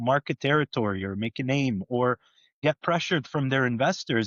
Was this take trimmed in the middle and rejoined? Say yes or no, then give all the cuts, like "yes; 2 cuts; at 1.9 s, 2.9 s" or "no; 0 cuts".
yes; 1 cut; at 2.6 s